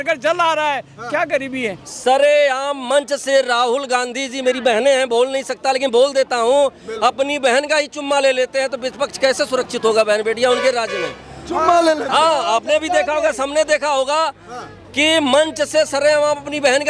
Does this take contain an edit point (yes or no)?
yes